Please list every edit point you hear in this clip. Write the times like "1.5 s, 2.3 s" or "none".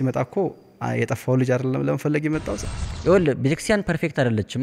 2.6 s